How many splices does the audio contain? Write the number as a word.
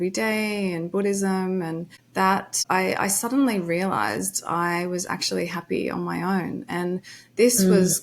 one